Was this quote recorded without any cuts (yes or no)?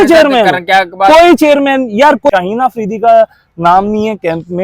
no